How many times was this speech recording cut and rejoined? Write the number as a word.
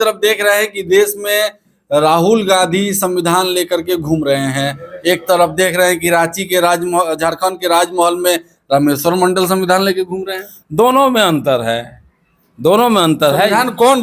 zero